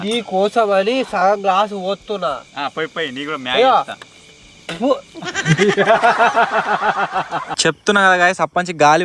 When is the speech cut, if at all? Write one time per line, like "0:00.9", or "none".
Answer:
0:07.5